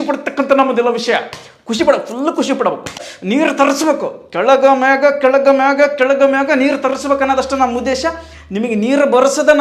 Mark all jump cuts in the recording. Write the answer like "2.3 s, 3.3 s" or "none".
3.1 s

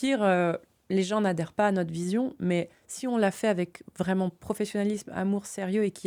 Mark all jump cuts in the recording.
none

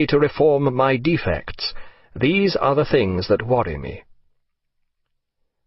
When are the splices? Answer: 2.7 s

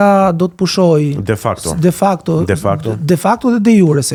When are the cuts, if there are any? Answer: none

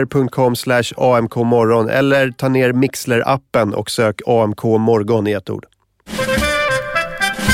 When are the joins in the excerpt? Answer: 6.1 s

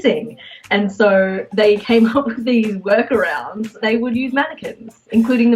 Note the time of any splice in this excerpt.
3.8 s

